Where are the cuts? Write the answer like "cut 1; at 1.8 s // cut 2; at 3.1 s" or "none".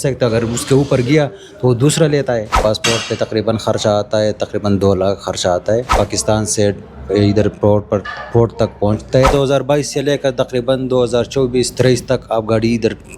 cut 1; at 2.6 s // cut 2; at 5.9 s // cut 3; at 9.3 s